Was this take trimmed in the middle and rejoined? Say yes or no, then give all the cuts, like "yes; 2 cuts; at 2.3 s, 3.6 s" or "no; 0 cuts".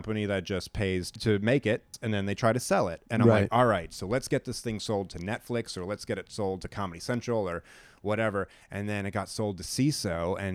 yes; 2 cuts; at 1.1 s, 1.9 s